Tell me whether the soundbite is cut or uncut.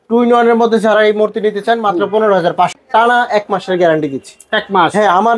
cut